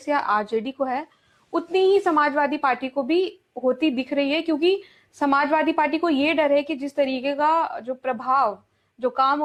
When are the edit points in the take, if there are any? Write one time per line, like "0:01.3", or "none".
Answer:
none